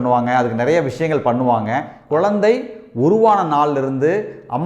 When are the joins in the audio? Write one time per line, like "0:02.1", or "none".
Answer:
0:01.9